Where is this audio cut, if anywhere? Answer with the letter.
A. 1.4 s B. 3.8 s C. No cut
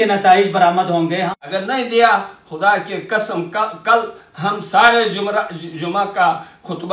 A